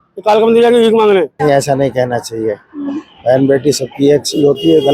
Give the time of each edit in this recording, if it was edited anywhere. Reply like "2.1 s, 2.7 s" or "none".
1.4 s